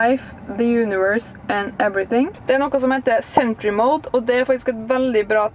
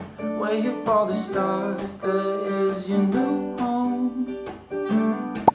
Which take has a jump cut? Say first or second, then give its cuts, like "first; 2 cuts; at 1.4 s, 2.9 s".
first; 1 cut; at 2.3 s